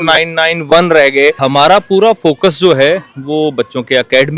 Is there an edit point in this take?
yes; 1 cut; at 1.4 s

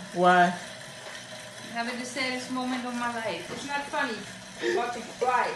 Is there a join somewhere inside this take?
yes; 1 cut; at 3.4 s

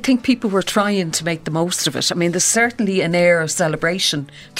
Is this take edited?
no; 0 cuts

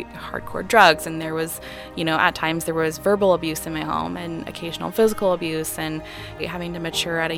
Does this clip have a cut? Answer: yes; 1 cut; at 6.4 s

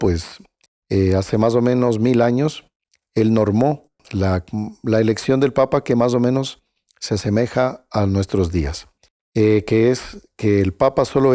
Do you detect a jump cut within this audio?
no; 0 cuts

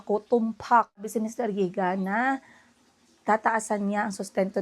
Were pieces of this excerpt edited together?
yes; 1 cut; at 1.1 s

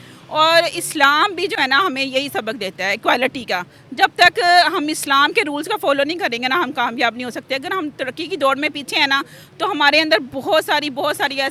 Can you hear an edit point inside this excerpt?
no; 0 cuts

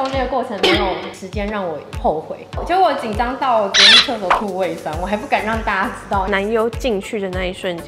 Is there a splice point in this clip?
yes; 2 cuts; at 2.5 s, 6.3 s

